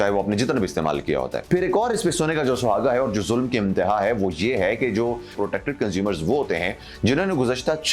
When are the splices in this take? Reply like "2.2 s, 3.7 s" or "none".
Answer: 1.4 s, 5.3 s